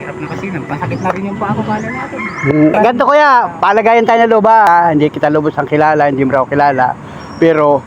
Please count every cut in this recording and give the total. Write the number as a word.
two